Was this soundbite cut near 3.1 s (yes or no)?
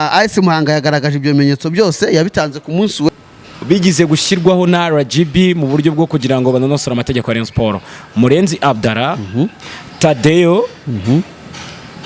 yes